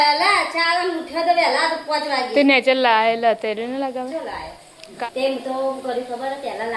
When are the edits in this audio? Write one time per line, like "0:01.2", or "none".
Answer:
0:05.0